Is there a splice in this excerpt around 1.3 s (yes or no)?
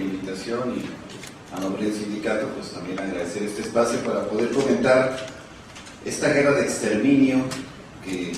no